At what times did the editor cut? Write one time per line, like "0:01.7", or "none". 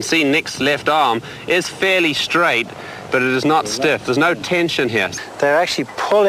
0:05.1